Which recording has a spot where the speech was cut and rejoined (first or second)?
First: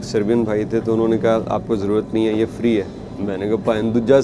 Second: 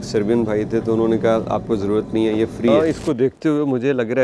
second